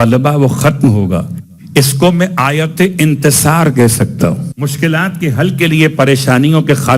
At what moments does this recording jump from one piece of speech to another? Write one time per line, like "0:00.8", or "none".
0:04.5